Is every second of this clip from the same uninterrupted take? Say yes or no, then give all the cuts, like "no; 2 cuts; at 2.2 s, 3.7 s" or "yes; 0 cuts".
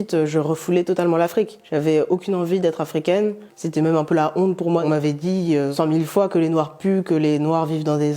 no; 2 cuts; at 3.6 s, 4.8 s